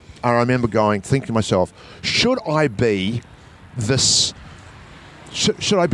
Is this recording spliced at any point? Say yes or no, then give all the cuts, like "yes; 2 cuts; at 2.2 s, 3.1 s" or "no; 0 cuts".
no; 0 cuts